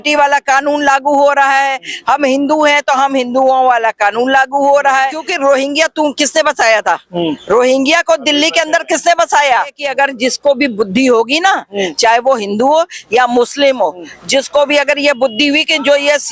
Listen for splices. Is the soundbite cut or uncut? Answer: cut